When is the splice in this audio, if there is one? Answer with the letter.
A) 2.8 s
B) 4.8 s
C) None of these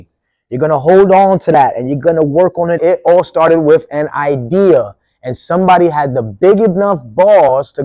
A